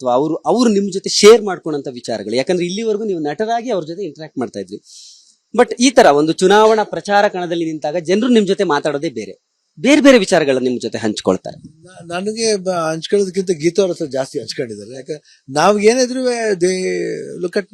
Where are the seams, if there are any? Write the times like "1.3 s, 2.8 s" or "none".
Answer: 11.7 s